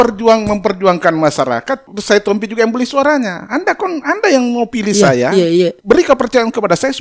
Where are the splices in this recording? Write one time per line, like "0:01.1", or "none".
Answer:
0:01.9
0:05.8